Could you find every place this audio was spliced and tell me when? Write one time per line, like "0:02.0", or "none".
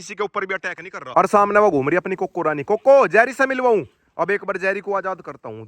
0:00.9

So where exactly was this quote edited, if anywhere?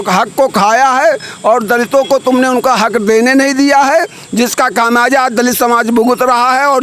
none

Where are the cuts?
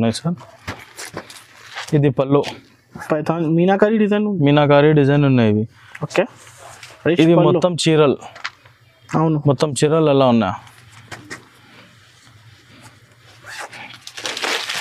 none

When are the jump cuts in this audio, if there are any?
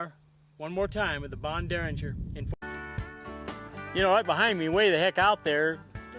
0:02.4

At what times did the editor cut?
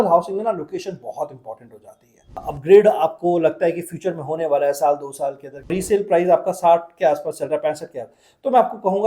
0:02.5
0:05.7

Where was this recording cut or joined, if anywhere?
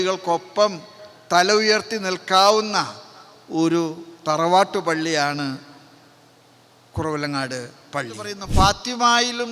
0:08.4

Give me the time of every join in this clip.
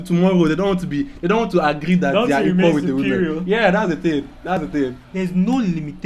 0:04.7

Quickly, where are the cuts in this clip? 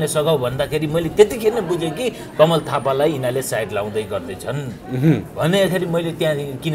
none

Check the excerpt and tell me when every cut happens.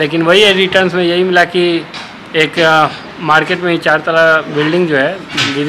none

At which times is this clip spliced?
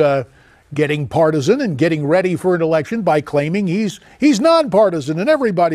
0:02.3

